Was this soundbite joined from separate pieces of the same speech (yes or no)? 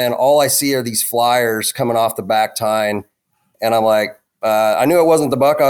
no